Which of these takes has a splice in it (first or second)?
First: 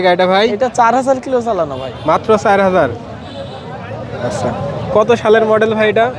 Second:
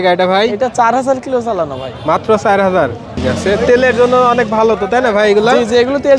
second